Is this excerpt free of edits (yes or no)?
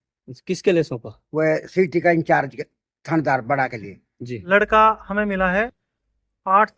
no